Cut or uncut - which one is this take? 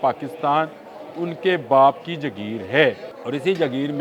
cut